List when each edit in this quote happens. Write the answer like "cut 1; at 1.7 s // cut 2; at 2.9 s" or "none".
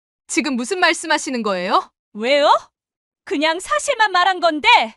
cut 1; at 2.0 s